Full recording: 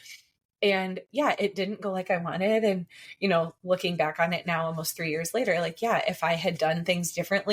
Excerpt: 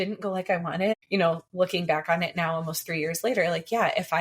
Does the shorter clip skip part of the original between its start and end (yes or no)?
yes